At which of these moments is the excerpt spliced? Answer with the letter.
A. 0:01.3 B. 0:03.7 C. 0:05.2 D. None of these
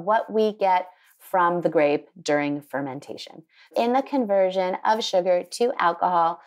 B